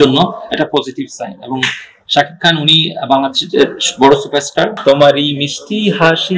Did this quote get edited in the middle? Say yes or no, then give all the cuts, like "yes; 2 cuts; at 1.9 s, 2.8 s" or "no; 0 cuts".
yes; 1 cut; at 4.7 s